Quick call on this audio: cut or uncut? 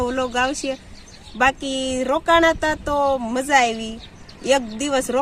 uncut